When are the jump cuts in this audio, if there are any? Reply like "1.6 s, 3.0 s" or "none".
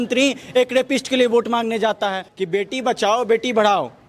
2.3 s

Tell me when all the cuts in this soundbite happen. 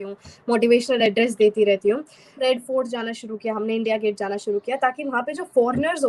2.3 s

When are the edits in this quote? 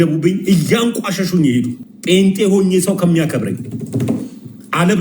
1.9 s

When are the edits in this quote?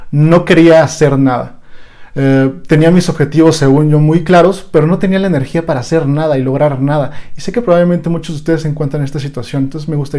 none

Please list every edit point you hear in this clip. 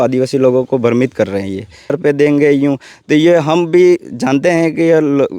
1.9 s

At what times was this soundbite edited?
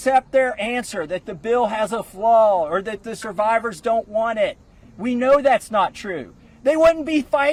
none

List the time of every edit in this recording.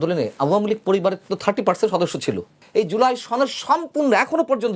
2.6 s

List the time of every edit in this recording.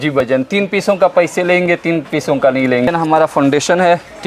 2.9 s

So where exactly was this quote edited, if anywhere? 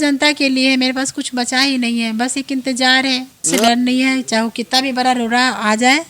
3.5 s

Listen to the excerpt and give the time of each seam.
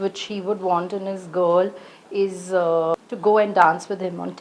3.0 s

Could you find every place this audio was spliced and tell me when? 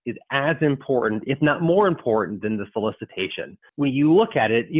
3.6 s

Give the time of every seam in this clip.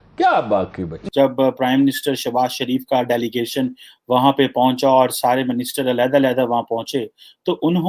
1.0 s

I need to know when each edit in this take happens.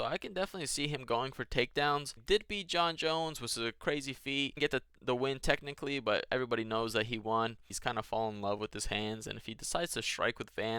2.1 s, 4.6 s, 7.6 s

